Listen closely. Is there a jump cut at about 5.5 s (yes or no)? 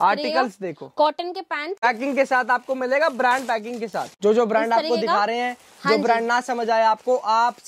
no